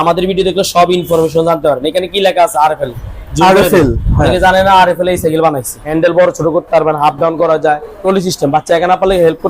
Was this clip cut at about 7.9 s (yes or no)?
yes